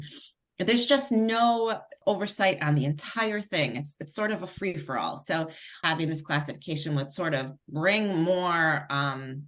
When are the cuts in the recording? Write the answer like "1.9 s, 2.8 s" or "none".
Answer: none